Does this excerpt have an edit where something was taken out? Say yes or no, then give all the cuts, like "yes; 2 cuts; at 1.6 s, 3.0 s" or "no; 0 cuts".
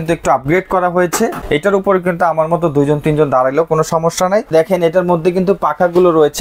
yes; 2 cuts; at 1.4 s, 4.5 s